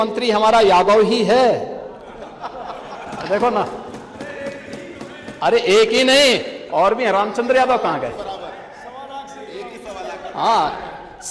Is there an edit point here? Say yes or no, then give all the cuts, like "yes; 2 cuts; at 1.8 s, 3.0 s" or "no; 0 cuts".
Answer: no; 0 cuts